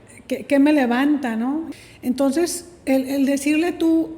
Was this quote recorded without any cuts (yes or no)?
no